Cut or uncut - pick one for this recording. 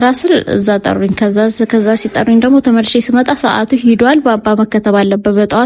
uncut